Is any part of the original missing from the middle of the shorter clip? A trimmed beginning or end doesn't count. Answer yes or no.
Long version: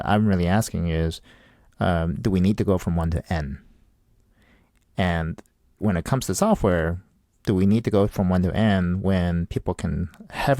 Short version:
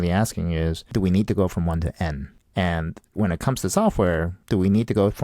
yes